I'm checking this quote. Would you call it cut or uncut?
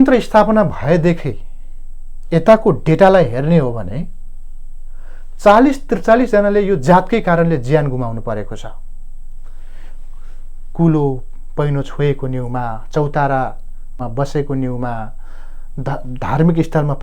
uncut